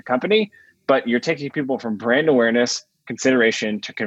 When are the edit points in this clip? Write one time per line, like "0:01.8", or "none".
none